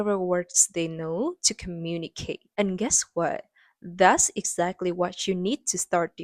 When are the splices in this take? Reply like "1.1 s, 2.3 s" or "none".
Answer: none